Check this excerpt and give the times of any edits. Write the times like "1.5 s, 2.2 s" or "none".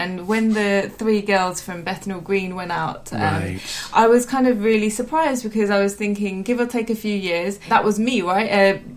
none